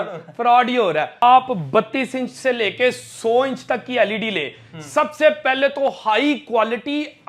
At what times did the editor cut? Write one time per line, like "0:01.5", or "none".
0:01.2